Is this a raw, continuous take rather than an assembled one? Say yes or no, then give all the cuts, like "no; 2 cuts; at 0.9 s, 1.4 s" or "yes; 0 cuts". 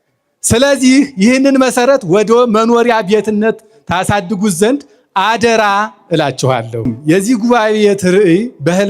no; 1 cut; at 6.9 s